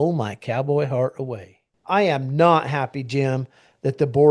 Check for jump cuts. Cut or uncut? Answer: cut